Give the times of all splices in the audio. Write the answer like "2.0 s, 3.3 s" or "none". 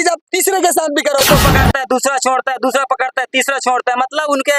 1.2 s